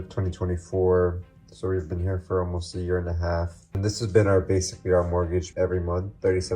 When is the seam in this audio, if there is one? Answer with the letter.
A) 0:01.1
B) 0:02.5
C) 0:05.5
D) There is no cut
C